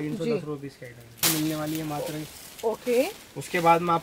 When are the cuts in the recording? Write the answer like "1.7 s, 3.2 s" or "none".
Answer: 1.2 s